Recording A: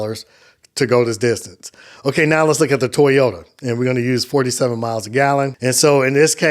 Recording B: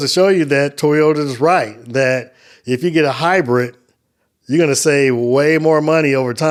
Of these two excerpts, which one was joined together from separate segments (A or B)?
A